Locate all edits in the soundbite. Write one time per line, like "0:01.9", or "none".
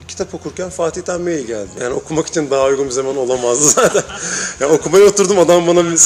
0:01.7